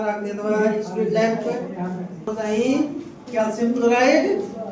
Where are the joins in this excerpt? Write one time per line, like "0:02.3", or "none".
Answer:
0:02.2